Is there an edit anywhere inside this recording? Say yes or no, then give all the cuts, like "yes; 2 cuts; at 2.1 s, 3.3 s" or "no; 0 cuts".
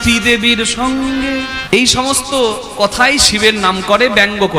yes; 1 cut; at 1.5 s